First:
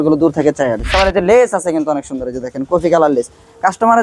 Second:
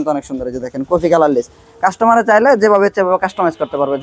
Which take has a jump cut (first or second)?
first